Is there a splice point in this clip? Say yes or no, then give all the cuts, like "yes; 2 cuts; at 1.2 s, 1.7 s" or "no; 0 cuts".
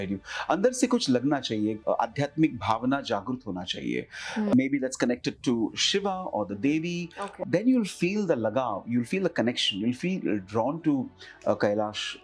yes; 3 cuts; at 1.8 s, 4.5 s, 7.2 s